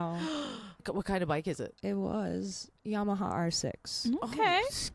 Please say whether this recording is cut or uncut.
cut